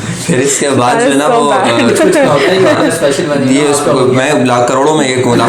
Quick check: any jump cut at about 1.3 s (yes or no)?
no